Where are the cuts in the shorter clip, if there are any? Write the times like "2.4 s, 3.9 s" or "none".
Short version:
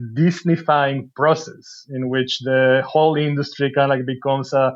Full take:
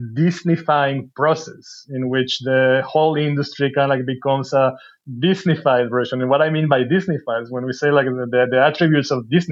none